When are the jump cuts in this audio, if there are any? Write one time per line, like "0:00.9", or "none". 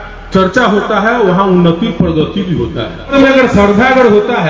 0:03.1